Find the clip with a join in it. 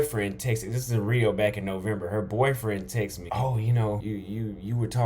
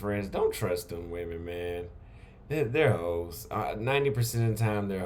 first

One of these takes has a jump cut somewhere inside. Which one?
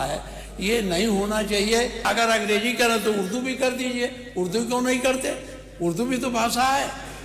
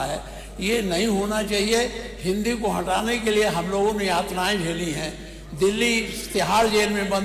first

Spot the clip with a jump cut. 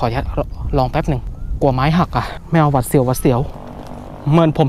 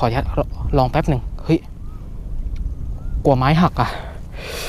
first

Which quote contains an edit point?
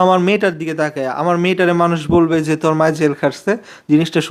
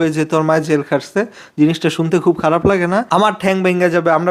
second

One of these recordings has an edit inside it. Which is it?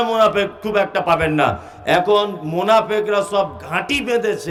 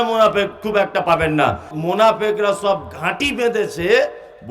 second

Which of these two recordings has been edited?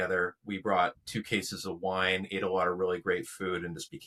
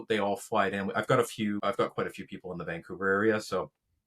second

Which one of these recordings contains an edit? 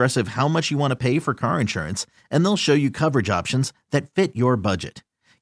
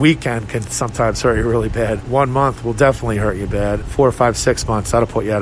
second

